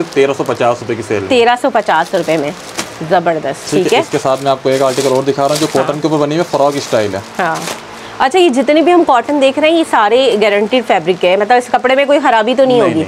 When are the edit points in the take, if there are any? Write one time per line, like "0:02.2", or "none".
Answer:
none

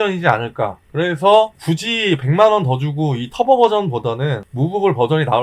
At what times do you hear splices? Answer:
0:01.6

